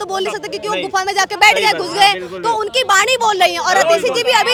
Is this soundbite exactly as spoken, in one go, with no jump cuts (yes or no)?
yes